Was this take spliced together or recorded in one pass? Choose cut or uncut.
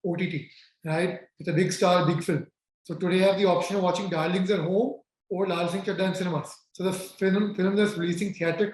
cut